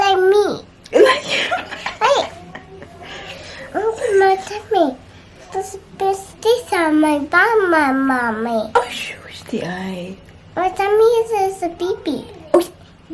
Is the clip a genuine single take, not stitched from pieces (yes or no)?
yes